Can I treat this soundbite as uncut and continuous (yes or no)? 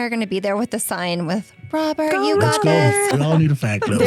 yes